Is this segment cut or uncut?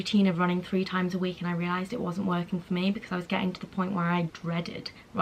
uncut